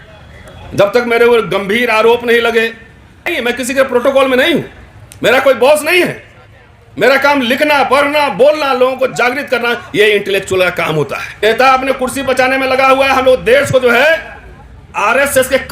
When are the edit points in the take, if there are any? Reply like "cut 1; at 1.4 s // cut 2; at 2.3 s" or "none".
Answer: cut 1; at 3.3 s // cut 2; at 11.2 s

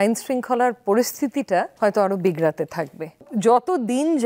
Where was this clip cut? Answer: cut 1; at 1.7 s // cut 2; at 3.2 s

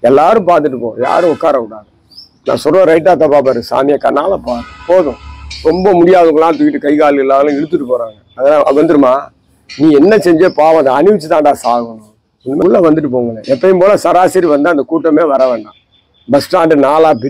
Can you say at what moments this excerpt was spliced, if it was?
cut 1; at 12.6 s

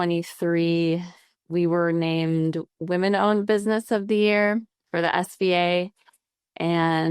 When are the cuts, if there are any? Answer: cut 1; at 4.8 s

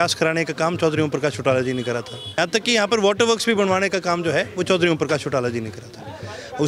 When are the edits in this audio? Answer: cut 1; at 2.2 s

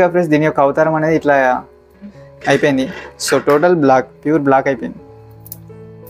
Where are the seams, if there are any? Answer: cut 1; at 5.0 s

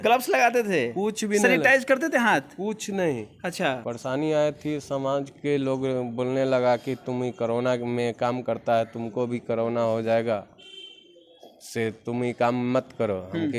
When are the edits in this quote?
cut 1; at 3.8 s

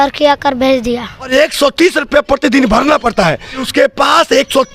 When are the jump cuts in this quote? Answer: cut 1; at 1.3 s // cut 2; at 3.7 s

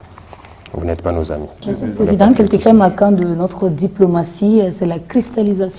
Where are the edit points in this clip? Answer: cut 1; at 1.5 s

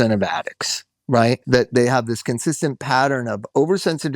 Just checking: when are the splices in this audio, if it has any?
cut 1; at 1.4 s

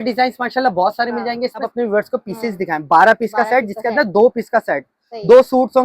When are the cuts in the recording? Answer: cut 1; at 1.7 s

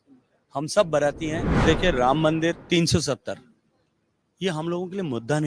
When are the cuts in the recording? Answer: cut 1; at 1.5 s // cut 2; at 2.6 s

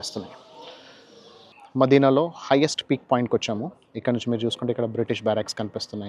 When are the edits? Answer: cut 1; at 1.5 s

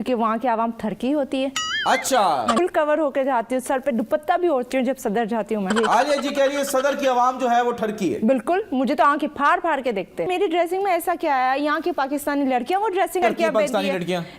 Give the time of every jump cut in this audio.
cut 1; at 2.6 s // cut 2; at 5.7 s // cut 3; at 10.3 s // cut 4; at 13.2 s

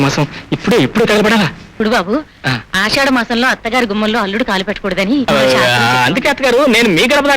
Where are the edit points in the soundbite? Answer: cut 1; at 1.8 s // cut 2; at 5.3 s

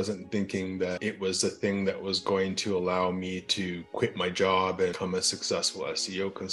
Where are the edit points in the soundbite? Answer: cut 1; at 1.0 s // cut 2; at 5.0 s

